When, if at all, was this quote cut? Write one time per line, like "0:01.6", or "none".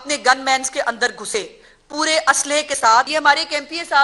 0:03.1